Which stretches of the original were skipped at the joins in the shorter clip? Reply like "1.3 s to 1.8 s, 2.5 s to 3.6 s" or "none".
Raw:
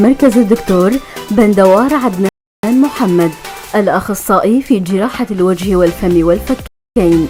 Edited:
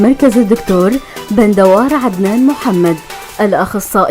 2.3 s to 2.6 s